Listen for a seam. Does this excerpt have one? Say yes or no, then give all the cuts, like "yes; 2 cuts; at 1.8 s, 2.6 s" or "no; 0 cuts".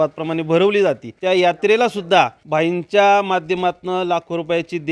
yes; 2 cuts; at 1.1 s, 2.4 s